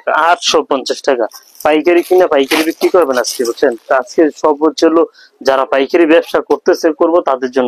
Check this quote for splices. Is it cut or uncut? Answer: uncut